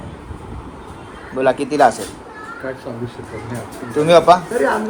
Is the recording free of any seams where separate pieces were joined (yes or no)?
yes